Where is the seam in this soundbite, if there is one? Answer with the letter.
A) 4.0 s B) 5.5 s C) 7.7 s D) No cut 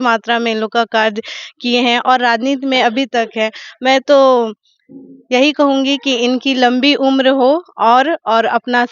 D